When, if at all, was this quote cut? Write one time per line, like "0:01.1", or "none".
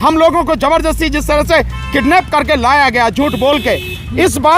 none

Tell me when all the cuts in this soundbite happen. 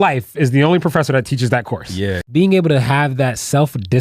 0:02.2

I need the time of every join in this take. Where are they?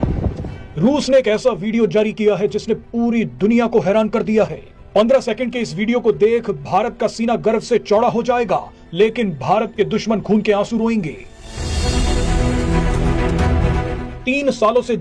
none

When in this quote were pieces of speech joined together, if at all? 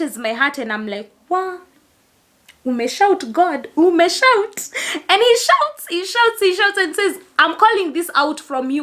none

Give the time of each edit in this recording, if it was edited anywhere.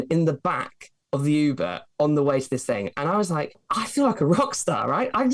0:03.6

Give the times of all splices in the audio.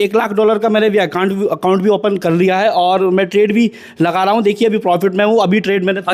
none

